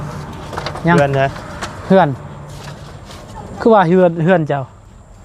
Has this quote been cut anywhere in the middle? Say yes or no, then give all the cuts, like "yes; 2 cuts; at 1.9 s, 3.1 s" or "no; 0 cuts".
no; 0 cuts